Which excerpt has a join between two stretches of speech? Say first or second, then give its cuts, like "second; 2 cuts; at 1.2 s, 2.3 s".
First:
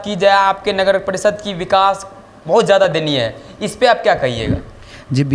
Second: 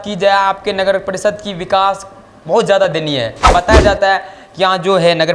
second; 1 cut; at 3.5 s